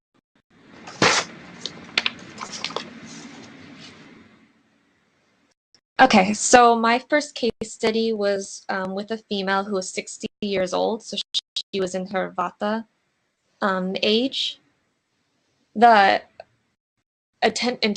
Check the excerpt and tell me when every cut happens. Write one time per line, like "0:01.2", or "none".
0:13.8